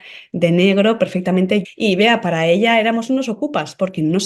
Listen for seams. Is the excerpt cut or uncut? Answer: cut